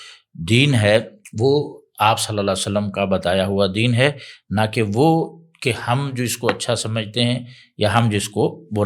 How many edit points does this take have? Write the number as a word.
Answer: zero